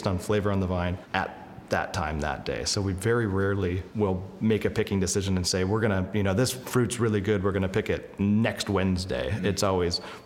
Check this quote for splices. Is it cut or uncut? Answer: cut